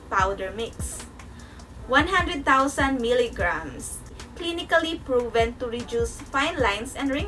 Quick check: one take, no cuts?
no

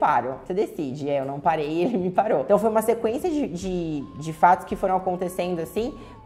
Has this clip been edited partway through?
no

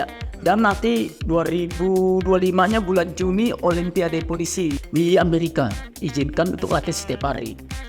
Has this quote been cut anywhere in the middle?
yes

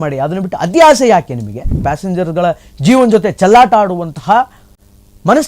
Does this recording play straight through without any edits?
no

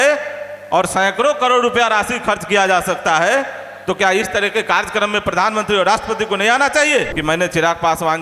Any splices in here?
yes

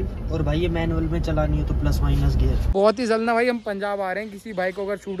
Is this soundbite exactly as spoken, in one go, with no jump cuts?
no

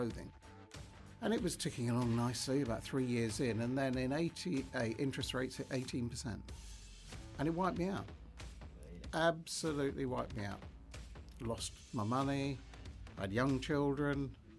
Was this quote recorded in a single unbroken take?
yes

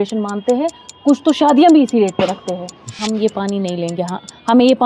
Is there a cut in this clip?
yes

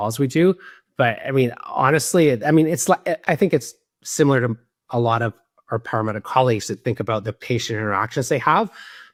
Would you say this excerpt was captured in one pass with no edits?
yes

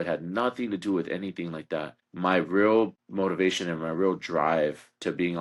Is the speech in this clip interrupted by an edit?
no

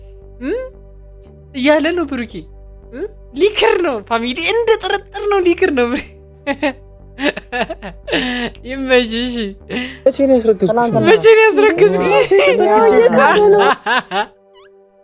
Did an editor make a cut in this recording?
no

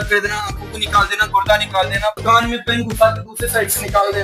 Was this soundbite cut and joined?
yes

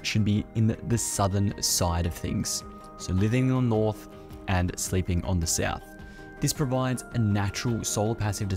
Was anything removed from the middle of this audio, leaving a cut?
no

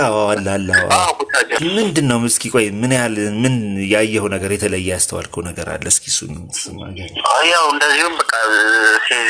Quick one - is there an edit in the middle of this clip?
yes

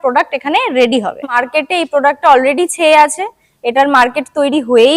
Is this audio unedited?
no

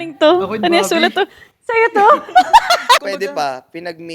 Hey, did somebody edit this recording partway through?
yes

